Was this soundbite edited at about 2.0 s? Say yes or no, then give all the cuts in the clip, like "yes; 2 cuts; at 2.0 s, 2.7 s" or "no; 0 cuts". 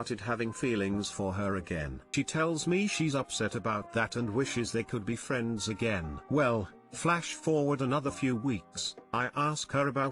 yes; 1 cut; at 2.0 s